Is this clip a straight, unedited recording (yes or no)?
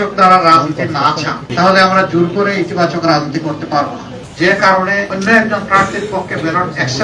no